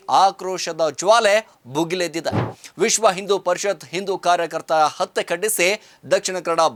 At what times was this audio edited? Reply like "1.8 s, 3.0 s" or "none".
none